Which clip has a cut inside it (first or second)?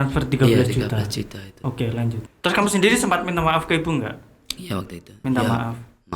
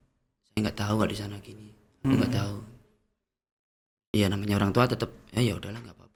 first